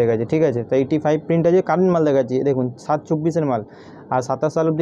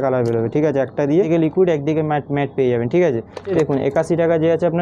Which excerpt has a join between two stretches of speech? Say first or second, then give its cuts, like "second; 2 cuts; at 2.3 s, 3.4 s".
second; 2 cuts; at 1.3 s, 3.5 s